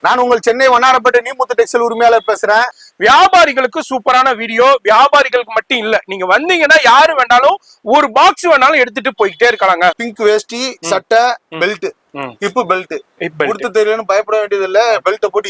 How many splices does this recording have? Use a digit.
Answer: 2